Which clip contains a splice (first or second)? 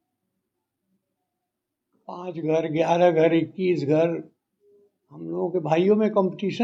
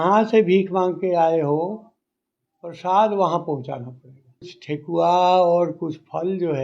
second